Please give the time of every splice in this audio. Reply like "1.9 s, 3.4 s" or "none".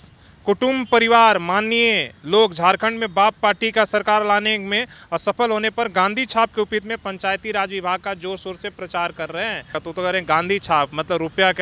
9.8 s